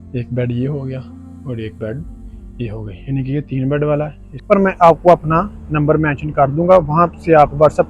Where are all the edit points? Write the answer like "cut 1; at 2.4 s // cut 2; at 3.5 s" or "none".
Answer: cut 1; at 4.5 s